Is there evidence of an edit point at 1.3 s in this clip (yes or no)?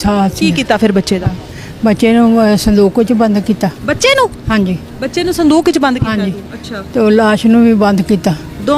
no